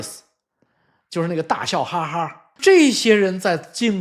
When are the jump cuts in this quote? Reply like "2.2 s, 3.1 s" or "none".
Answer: 2.4 s

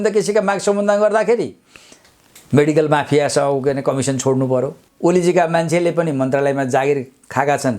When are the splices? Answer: 4.8 s

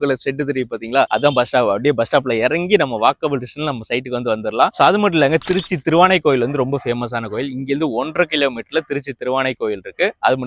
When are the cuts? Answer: none

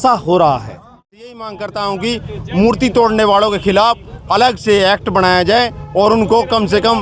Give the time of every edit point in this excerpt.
0.9 s

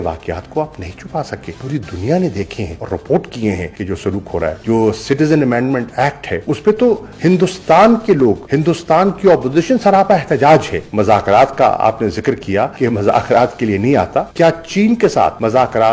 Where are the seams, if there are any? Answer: 10.8 s, 14.3 s

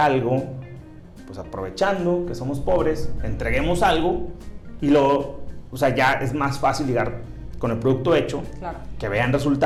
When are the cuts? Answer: none

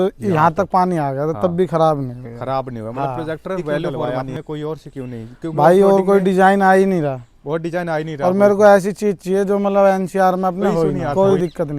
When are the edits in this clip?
4.0 s, 11.0 s

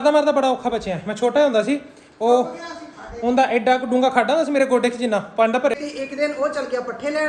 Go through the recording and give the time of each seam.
5.7 s

